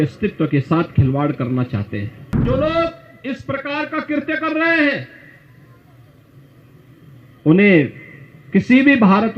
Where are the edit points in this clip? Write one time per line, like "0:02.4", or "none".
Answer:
0:02.4